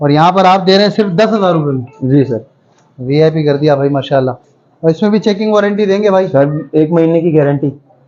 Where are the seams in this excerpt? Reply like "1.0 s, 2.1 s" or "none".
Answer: none